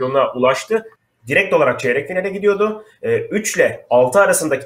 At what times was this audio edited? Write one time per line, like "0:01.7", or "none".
0:00.9